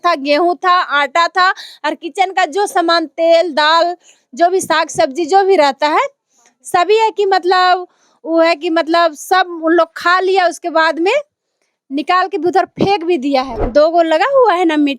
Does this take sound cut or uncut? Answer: cut